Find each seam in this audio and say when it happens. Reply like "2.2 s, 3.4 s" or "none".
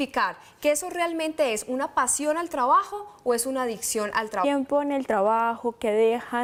none